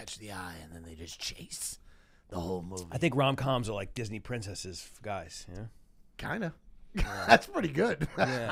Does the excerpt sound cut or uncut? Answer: uncut